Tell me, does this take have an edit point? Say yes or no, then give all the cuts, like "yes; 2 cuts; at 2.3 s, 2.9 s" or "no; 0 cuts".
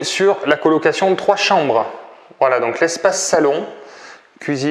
no; 0 cuts